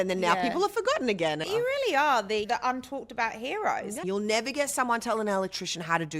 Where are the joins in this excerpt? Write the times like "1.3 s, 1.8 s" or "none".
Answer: 1.4 s, 2.4 s, 4.0 s

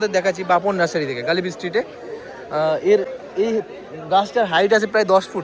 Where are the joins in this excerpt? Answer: none

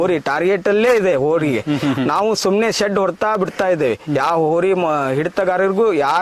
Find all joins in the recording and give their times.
none

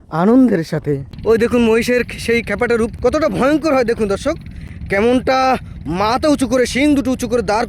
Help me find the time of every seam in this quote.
1.1 s, 3.1 s

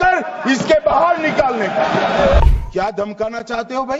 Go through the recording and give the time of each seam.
2.4 s

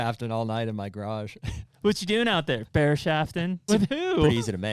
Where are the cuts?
3.6 s

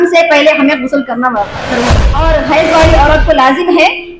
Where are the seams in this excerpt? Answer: 2.0 s

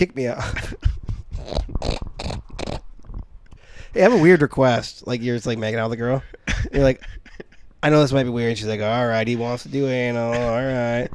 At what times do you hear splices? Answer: none

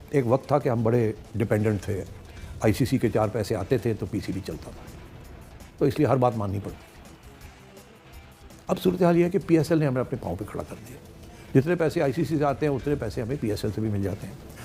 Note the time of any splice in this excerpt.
none

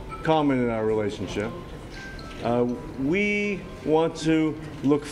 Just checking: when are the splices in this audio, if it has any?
none

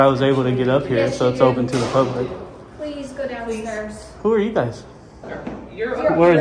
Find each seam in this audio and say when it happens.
5.2 s

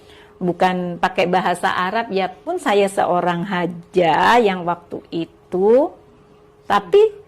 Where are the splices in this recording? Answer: 2.5 s

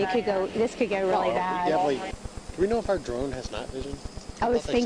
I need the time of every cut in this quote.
2.1 s

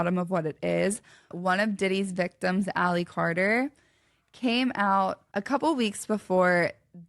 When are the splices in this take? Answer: 1.3 s, 5.3 s

